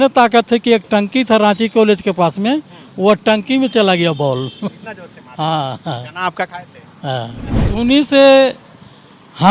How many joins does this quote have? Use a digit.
1